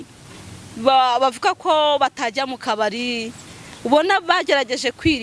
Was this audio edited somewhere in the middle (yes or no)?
no